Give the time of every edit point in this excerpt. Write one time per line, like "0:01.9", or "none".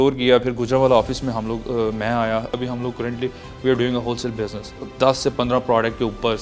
0:02.6
0:04.8